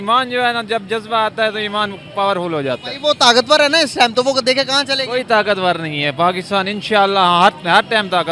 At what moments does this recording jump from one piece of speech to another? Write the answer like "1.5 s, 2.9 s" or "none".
none